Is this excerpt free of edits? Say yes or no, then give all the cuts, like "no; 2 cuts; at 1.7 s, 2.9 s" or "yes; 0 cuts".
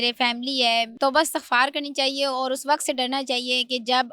no; 1 cut; at 1.0 s